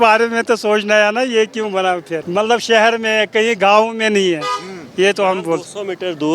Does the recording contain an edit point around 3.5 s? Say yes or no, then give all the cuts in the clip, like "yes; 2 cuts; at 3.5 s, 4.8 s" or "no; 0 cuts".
no; 1 cut; at 2.2 s